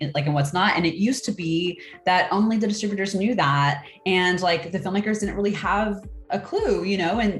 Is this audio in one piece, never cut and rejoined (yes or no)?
yes